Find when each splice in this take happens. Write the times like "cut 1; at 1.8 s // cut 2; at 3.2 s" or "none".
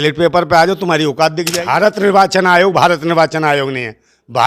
cut 1; at 1.6 s